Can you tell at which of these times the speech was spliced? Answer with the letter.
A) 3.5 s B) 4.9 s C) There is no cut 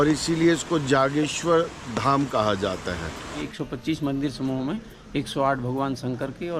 A